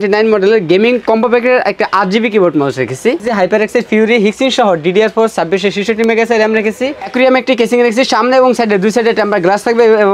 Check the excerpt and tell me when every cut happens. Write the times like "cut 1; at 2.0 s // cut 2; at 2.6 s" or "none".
cut 1; at 3.3 s // cut 2; at 7.1 s